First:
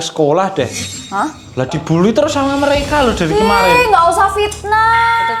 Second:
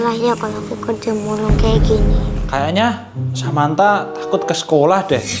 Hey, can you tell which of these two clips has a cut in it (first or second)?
second